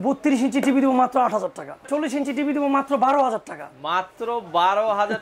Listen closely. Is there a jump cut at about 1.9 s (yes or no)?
yes